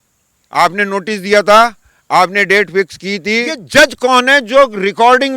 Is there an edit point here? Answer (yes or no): yes